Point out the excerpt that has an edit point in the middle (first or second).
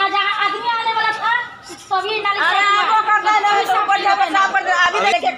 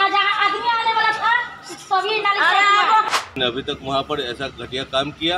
second